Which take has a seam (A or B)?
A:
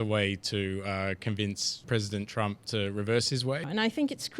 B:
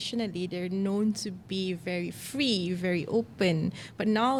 A